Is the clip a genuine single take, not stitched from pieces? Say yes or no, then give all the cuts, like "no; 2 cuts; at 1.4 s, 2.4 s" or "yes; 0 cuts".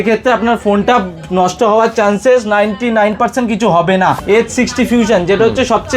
no; 1 cut; at 4.2 s